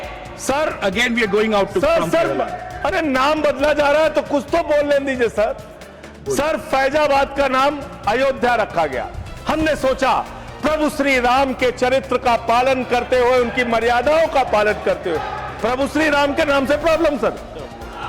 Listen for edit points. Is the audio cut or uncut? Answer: uncut